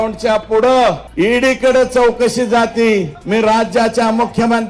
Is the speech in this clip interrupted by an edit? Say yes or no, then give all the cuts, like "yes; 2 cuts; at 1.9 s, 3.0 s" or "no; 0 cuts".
yes; 2 cuts; at 1.0 s, 3.2 s